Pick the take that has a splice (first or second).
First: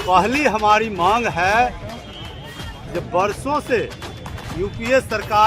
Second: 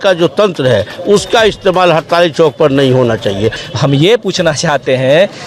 second